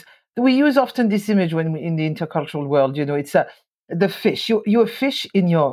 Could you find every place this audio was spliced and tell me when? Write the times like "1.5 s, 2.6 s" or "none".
none